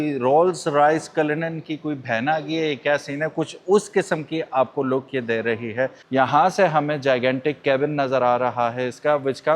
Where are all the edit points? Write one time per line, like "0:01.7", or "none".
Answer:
0:06.1